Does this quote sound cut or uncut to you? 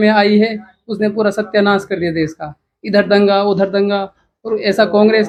uncut